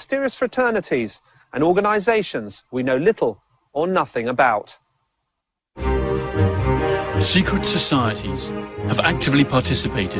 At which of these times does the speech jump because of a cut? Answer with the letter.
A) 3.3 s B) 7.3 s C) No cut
A